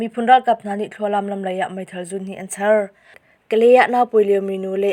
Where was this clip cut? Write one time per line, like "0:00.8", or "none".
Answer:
0:03.2